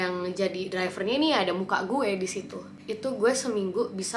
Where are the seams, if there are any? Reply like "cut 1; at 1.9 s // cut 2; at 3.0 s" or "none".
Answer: cut 1; at 2.8 s